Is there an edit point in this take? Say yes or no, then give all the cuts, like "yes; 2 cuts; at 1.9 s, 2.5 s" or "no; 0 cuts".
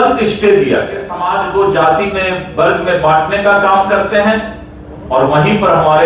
yes; 1 cut; at 1.1 s